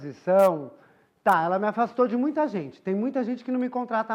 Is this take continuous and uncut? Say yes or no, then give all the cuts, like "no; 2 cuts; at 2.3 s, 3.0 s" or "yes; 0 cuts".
yes; 0 cuts